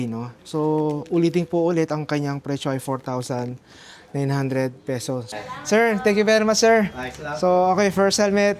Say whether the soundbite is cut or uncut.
cut